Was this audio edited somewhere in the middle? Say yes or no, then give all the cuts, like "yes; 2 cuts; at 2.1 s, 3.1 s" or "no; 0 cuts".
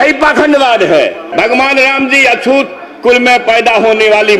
yes; 1 cut; at 1.3 s